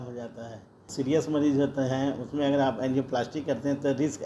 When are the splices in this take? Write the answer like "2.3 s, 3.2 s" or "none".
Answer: 0.9 s